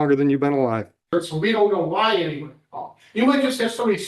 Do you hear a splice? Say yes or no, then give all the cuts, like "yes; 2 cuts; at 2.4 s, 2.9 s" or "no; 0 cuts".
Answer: yes; 1 cut; at 1.0 s